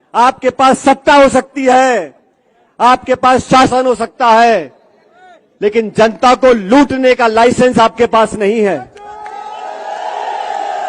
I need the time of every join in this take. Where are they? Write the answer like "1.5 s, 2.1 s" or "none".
none